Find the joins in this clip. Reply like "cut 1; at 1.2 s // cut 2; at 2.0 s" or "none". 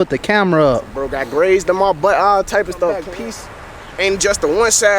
cut 1; at 3.1 s